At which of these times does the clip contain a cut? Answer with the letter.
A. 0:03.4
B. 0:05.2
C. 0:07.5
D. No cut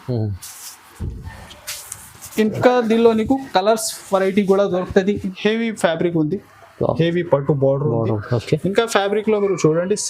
B